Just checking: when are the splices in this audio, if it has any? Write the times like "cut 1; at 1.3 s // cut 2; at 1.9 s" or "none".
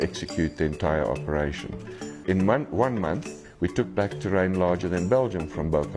cut 1; at 2.2 s